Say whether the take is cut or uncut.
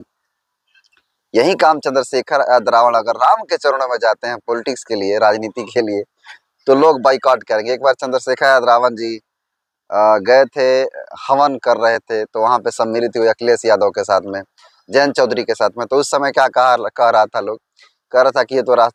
uncut